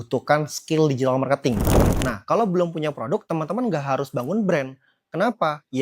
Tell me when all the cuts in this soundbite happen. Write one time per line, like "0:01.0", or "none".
0:01.8